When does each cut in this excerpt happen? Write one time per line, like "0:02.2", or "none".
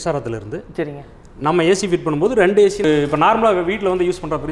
0:02.8